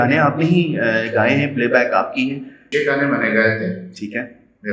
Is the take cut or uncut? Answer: cut